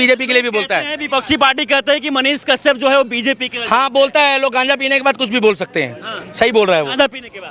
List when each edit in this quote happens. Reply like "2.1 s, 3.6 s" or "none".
none